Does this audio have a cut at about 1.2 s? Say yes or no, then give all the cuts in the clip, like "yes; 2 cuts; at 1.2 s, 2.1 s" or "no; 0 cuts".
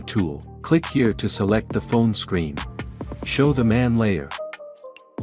no; 1 cut; at 4.3 s